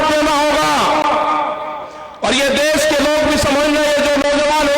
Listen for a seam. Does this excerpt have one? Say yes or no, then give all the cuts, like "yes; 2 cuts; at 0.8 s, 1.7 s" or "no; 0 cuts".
no; 0 cuts